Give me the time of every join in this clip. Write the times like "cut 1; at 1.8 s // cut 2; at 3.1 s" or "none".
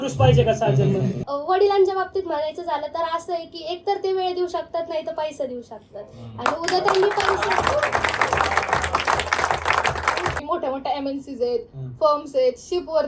cut 1; at 1.3 s // cut 2; at 10.4 s